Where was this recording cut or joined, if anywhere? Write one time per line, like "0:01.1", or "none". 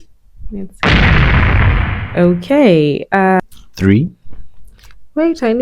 0:03.4